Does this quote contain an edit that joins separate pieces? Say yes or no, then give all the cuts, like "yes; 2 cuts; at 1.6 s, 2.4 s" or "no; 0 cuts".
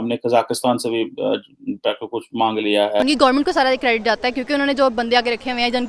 yes; 1 cut; at 3.0 s